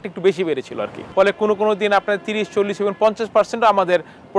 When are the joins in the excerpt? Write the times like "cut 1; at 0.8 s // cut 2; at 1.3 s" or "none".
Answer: cut 1; at 1.0 s